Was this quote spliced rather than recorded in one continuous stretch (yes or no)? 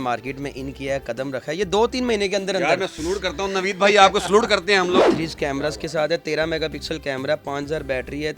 yes